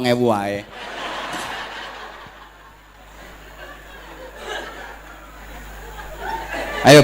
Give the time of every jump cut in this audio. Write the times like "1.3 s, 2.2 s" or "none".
none